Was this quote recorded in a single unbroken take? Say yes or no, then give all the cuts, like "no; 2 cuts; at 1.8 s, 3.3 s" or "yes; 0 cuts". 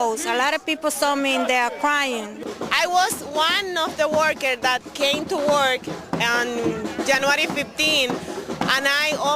no; 1 cut; at 2.4 s